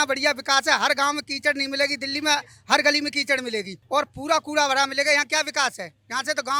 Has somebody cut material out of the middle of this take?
no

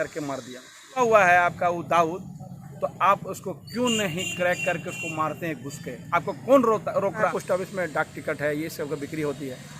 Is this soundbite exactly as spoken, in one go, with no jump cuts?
no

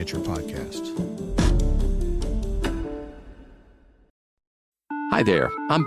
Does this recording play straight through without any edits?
no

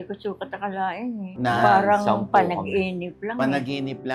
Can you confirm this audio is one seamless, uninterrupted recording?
yes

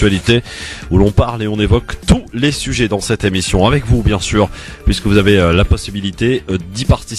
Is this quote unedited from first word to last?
yes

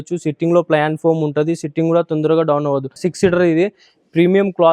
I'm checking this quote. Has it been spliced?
yes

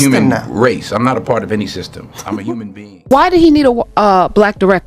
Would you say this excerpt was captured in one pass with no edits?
no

